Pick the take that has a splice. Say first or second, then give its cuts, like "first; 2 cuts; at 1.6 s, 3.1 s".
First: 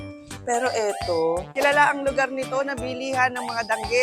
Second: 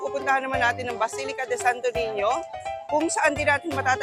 first; 1 cut; at 1.5 s